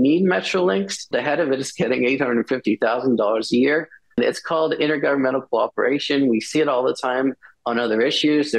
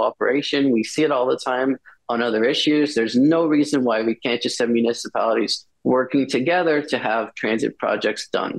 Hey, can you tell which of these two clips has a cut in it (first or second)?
first